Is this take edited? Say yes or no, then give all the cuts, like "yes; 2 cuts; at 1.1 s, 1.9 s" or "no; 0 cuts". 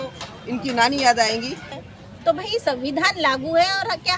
yes; 1 cut; at 1.8 s